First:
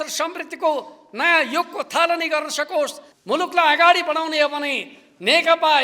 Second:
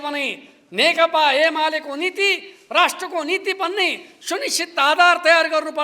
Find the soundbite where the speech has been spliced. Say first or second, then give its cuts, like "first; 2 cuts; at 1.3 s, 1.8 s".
first; 1 cut; at 3.1 s